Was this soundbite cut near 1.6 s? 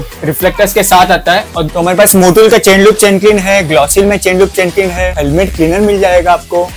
yes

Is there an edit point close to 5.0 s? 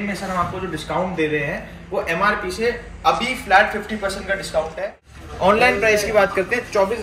yes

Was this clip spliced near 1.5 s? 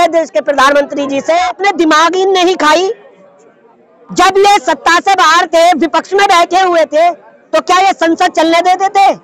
yes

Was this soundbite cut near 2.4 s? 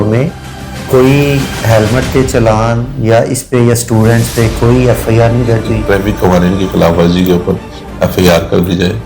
no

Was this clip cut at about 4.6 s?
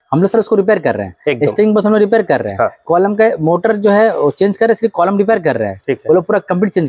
no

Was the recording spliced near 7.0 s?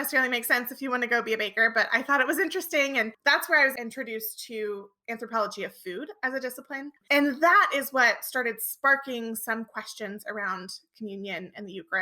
yes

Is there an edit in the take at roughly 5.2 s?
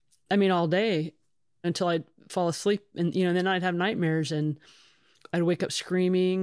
no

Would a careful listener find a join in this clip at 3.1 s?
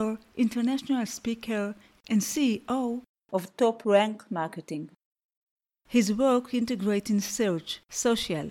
yes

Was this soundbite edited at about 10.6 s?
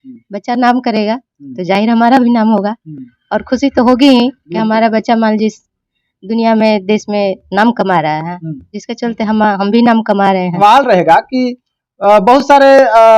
yes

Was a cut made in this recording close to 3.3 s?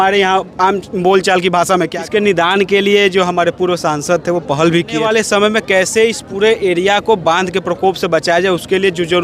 no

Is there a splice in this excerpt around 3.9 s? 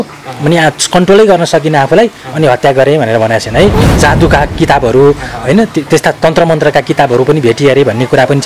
yes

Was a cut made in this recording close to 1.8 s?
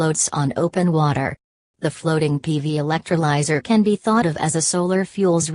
yes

